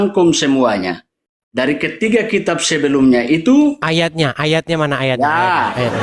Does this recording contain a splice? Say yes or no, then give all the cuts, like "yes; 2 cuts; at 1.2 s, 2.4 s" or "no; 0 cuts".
yes; 1 cut; at 3.9 s